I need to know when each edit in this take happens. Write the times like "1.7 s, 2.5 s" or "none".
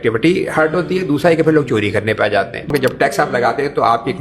2.7 s